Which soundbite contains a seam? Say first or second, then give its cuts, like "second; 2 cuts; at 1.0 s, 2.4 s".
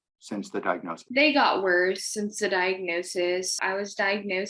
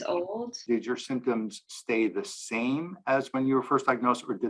first; 1 cut; at 3.6 s